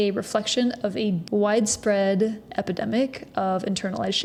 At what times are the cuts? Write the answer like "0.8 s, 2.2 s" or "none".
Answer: none